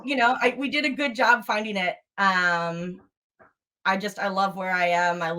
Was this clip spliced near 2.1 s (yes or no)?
no